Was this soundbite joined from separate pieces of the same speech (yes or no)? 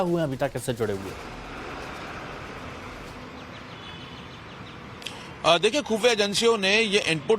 yes